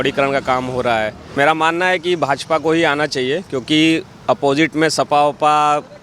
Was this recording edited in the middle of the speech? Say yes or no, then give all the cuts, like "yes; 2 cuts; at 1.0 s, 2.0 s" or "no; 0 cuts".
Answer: yes; 1 cut; at 1.2 s